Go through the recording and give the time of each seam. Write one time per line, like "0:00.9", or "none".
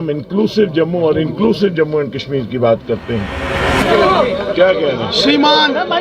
0:03.7